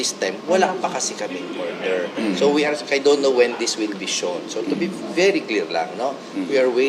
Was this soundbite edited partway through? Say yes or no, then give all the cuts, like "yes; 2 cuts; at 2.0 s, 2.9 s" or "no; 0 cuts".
no; 0 cuts